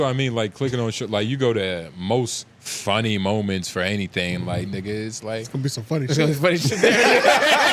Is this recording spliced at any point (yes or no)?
no